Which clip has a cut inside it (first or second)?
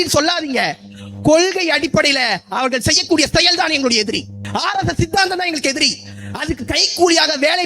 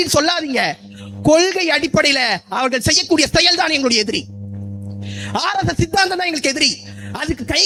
first